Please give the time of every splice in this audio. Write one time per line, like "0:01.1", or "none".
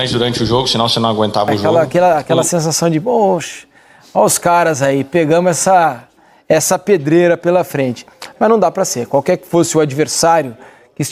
0:01.6